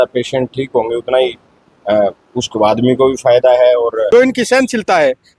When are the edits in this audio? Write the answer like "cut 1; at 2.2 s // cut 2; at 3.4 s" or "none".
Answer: cut 1; at 4.1 s